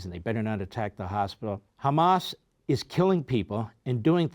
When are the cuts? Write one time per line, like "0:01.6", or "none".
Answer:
0:01.7